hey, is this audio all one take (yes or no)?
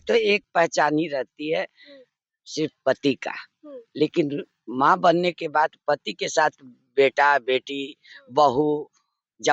yes